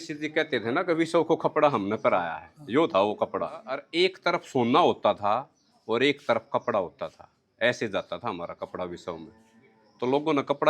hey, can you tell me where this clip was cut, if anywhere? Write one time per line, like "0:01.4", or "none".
none